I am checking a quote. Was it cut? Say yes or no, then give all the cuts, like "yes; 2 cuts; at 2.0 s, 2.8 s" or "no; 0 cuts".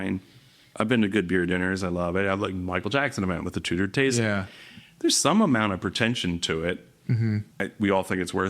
yes; 1 cut; at 7.5 s